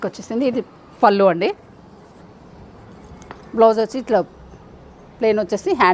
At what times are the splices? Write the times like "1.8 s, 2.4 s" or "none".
none